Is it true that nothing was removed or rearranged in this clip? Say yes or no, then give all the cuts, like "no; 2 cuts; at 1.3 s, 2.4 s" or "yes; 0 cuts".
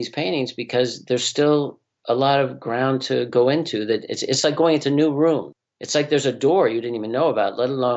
yes; 0 cuts